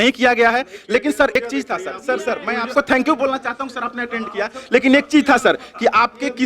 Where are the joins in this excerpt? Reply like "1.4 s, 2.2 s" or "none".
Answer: 1.4 s, 2.7 s